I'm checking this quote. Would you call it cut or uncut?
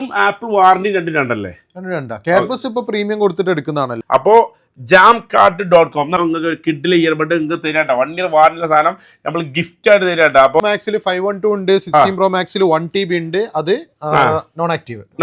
cut